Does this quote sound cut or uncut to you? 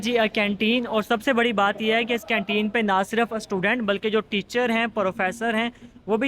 uncut